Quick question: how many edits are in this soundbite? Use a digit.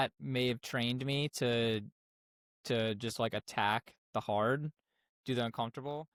0